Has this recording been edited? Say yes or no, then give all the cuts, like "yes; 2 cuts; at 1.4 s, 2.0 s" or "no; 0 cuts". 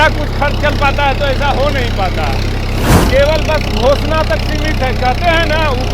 yes; 1 cut; at 3.0 s